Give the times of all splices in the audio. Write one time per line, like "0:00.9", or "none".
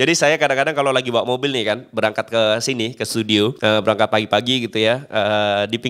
0:03.6